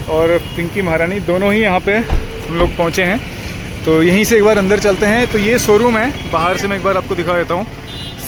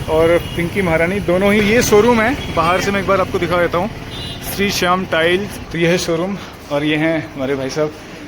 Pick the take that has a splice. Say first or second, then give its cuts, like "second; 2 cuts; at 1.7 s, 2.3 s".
second; 2 cuts; at 1.6 s, 5.6 s